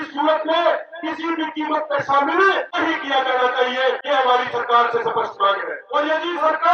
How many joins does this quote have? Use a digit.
3